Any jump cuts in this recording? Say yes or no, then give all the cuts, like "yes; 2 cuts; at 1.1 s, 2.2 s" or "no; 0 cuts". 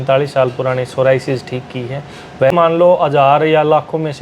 yes; 1 cut; at 2.5 s